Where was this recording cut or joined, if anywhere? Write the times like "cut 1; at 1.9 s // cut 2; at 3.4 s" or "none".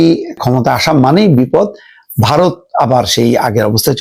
none